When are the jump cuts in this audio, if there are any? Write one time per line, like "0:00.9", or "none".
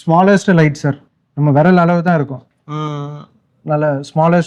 none